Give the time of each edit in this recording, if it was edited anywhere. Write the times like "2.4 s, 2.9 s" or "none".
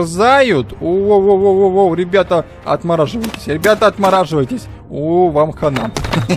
none